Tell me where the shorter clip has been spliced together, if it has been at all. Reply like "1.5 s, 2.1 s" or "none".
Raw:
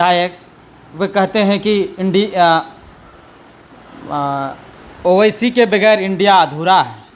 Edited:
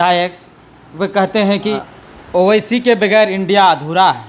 1.8 s